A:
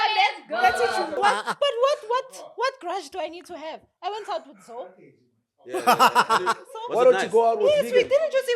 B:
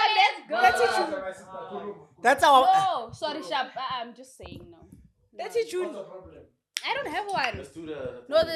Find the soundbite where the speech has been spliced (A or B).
A